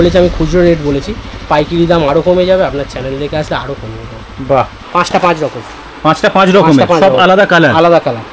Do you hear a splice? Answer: yes; 1 cut; at 4.8 s

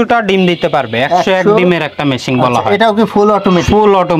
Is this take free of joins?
yes; 0 cuts

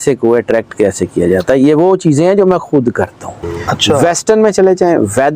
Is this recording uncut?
no; 1 cut; at 4.0 s

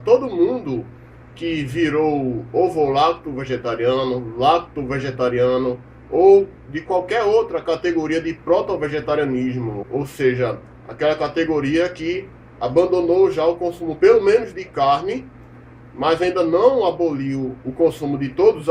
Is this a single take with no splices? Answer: yes; 0 cuts

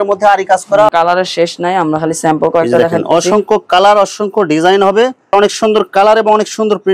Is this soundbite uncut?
no; 2 cuts; at 0.9 s, 5.2 s

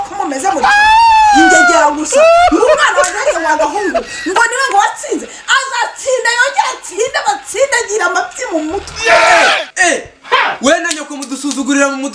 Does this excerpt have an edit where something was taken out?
yes; 1 cut; at 9.3 s

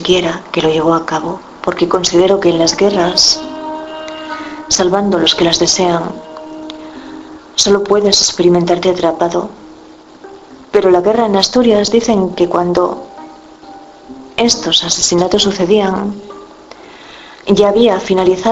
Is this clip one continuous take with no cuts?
no; 1 cut; at 7.3 s

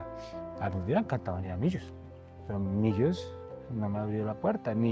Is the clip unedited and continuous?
yes; 0 cuts

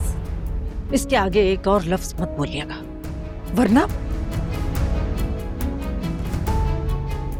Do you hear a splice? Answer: no; 0 cuts

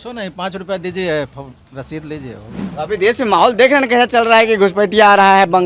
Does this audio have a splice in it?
yes; 1 cut; at 2.6 s

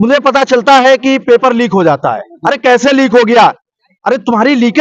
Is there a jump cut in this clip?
no; 0 cuts

